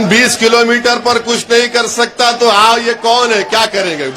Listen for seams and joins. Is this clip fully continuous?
yes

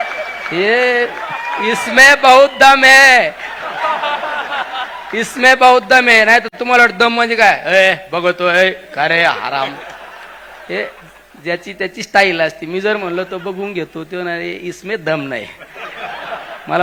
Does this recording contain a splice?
no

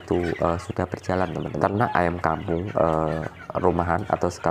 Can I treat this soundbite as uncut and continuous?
no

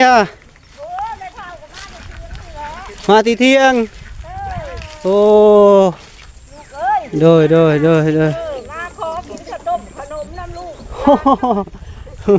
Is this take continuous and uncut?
yes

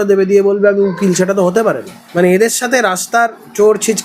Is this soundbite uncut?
no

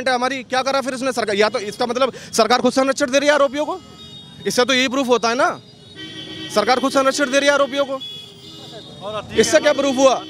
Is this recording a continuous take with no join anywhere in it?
yes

